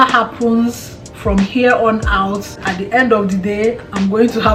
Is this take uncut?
no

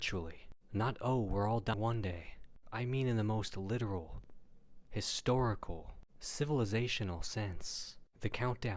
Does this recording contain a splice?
yes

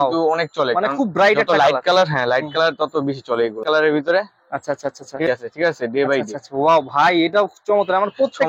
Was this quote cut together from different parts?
yes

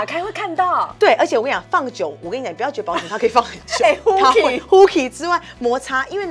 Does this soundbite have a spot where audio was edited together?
no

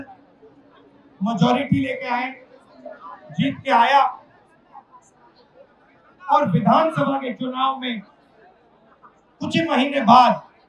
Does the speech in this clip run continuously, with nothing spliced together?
yes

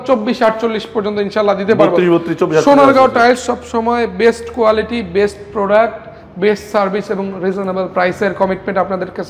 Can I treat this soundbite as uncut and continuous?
yes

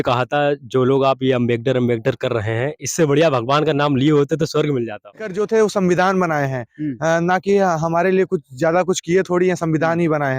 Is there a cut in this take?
yes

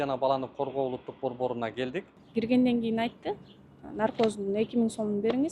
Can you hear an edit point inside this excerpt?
yes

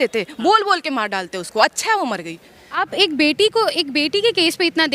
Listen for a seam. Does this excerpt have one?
yes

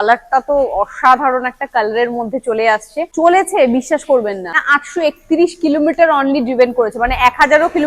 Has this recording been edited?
yes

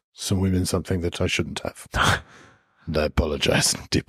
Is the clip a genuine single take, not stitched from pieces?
yes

